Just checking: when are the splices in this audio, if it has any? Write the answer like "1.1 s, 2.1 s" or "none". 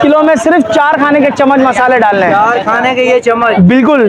none